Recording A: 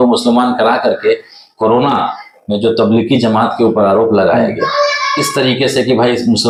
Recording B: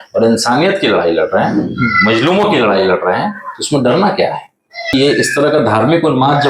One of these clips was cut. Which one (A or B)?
B